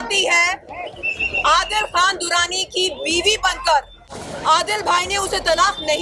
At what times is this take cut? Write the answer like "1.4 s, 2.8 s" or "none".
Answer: 4.1 s